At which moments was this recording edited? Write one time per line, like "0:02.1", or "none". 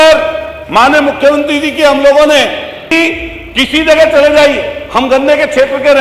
0:02.9